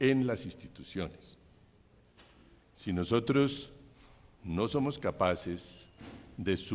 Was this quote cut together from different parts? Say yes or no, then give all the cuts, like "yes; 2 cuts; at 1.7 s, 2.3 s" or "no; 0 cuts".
yes; 1 cut; at 3.4 s